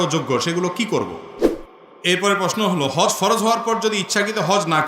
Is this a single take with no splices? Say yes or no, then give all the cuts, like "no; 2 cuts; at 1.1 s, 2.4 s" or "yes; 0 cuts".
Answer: no; 1 cut; at 1.4 s